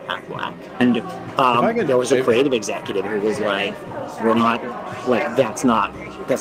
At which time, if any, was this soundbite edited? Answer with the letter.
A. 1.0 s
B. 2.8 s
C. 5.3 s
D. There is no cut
D